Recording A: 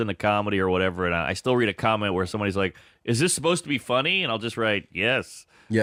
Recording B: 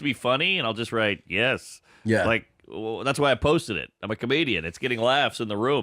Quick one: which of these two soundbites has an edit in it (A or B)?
B